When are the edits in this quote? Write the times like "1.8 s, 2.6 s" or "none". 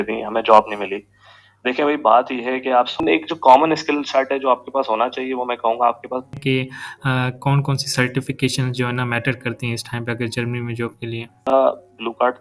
3.0 s, 6.3 s, 11.4 s